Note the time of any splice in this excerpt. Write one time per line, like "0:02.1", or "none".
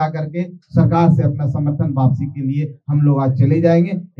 none

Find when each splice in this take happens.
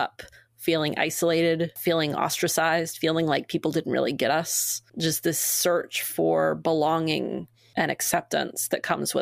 0:01.8
0:04.8
0:07.5

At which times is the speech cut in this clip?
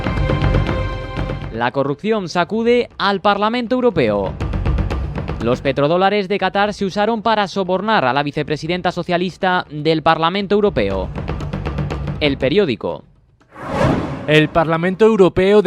0:01.5

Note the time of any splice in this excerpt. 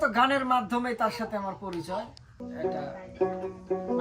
0:02.4

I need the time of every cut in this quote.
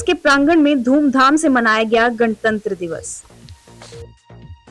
0:03.0

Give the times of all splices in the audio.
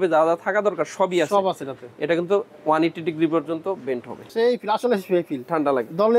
0:04.2

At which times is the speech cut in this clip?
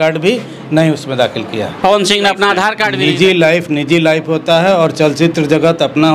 0:02.9

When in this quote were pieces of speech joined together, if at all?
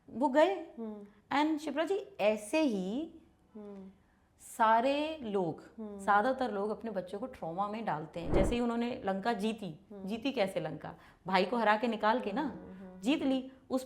0:08.3

